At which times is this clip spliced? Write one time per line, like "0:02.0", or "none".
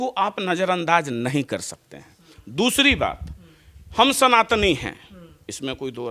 none